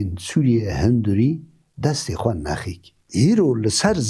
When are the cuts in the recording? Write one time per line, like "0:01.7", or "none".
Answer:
0:03.0